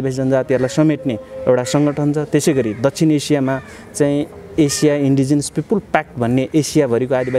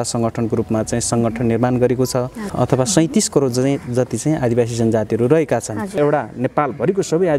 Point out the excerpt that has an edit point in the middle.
second; 2 cuts; at 2.4 s, 6.0 s

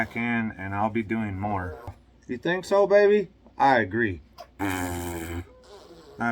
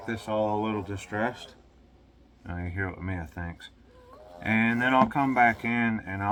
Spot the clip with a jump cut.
first; 1 cut; at 2.1 s

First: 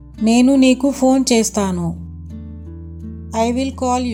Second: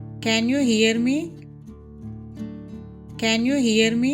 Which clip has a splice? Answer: second; 2 cuts; at 1.5 s, 3.1 s

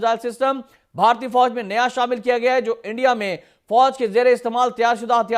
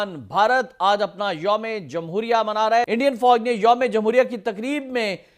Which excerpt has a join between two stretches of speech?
second; 1 cut; at 2.9 s

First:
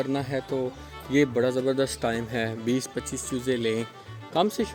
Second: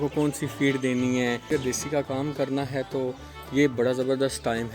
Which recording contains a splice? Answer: second; 1 cut; at 1.5 s

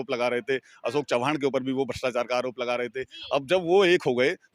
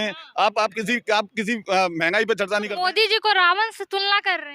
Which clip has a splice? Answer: second; 1 cut; at 2.7 s

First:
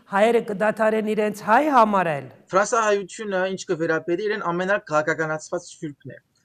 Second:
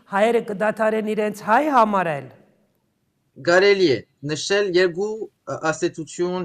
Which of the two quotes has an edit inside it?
first; 1 cut; at 2.3 s

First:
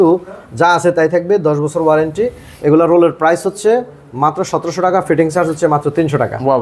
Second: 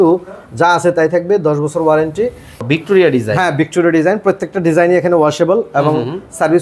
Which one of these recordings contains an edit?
second; 1 cut; at 2.6 s

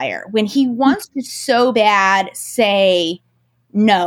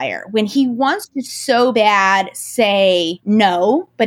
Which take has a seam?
second; 1 cut; at 3.1 s

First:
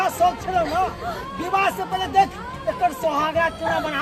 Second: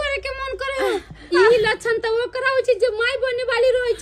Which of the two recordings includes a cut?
second; 1 cut; at 1.3 s

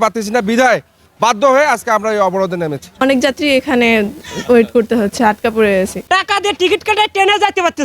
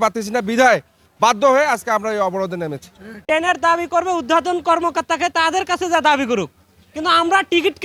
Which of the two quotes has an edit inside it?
first; 2 cuts; at 2.9 s, 6.0 s

